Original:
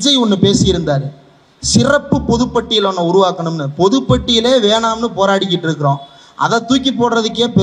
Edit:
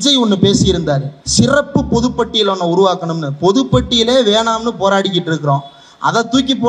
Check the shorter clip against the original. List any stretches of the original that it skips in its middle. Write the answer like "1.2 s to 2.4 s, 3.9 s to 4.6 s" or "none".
1.2 s to 1.5 s